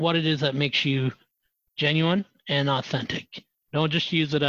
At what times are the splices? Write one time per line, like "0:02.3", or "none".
none